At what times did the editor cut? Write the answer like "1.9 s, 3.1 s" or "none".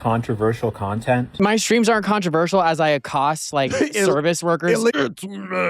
1.3 s, 4.9 s